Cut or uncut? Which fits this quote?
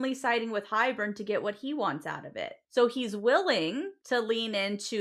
cut